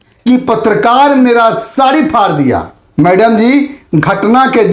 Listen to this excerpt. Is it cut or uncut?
cut